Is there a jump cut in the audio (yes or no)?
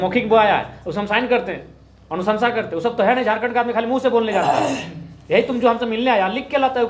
no